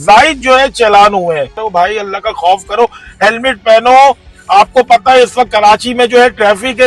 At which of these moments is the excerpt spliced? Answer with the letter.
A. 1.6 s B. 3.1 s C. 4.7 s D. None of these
A